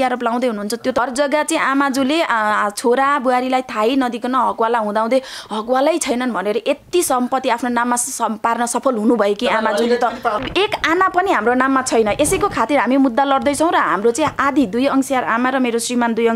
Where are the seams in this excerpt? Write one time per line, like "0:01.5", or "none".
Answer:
0:01.0
0:10.4

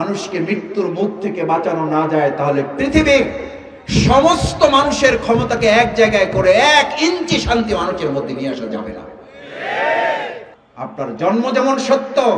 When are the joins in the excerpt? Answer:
0:10.4

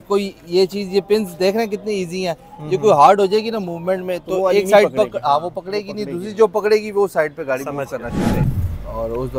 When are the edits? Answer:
0:08.4

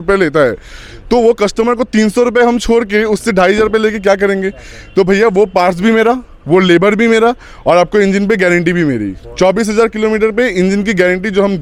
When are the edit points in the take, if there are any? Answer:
none

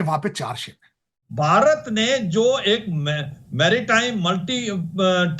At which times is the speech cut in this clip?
0:01.2

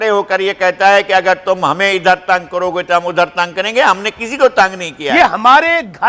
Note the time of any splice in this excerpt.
0:05.0

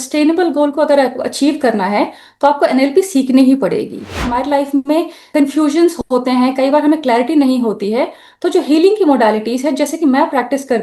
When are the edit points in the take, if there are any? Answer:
0:04.2
0:05.3

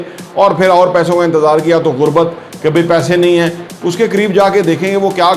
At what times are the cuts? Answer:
0:03.6

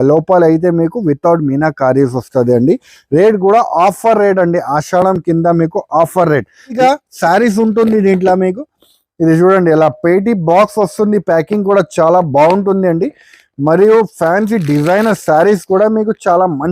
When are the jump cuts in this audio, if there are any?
0:06.8

